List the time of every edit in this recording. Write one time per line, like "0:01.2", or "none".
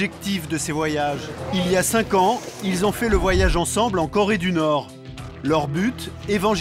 0:01.3